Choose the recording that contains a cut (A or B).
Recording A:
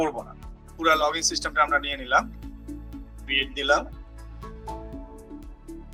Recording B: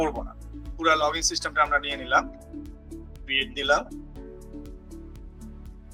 A